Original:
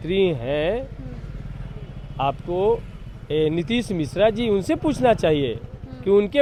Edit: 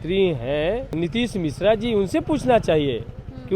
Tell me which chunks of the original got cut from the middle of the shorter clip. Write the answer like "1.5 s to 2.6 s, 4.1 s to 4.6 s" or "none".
1.0 s to 3.5 s